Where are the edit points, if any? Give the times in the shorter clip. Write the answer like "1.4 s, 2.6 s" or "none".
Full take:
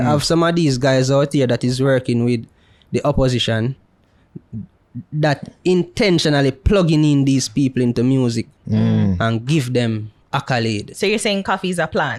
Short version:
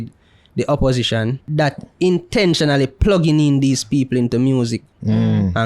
1.4 s